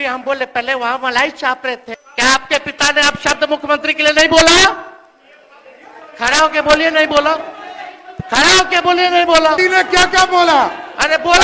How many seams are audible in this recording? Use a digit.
2